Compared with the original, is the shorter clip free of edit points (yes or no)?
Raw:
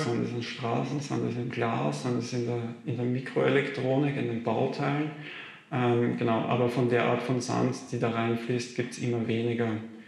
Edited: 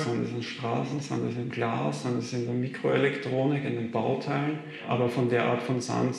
no